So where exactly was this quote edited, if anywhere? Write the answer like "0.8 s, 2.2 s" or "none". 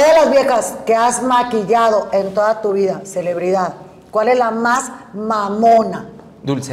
none

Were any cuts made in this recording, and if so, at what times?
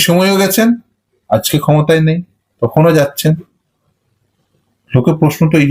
none

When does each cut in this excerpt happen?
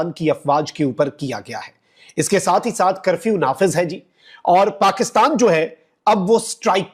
none

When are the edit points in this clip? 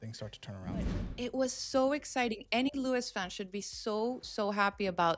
1.0 s

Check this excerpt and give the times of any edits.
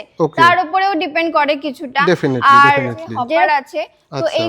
3.5 s

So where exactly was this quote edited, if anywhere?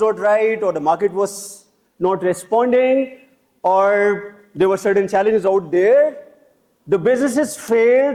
none

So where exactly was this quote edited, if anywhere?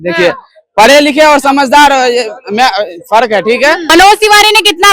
3.9 s

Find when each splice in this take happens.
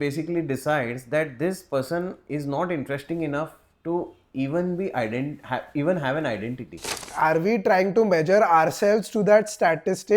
7.1 s

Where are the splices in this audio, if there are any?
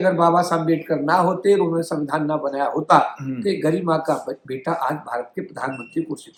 none

